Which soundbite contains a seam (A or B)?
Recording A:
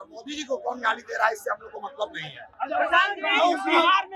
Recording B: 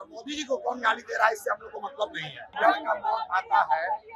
B